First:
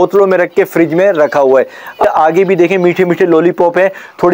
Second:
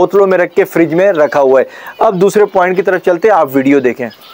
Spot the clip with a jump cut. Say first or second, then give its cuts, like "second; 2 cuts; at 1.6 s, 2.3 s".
first; 1 cut; at 2.0 s